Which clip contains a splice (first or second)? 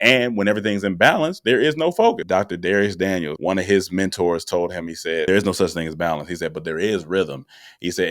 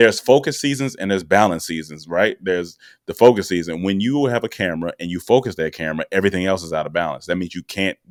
first